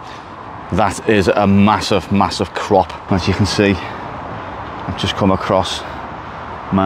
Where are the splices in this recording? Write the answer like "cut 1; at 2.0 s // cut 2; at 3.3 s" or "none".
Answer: cut 1; at 3.0 s